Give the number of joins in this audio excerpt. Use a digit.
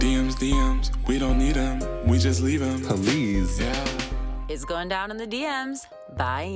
0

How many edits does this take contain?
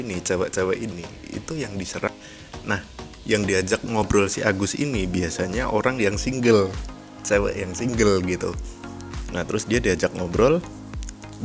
1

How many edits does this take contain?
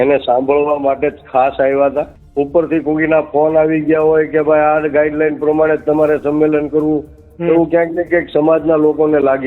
1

